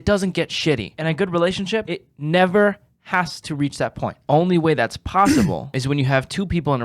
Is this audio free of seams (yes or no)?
no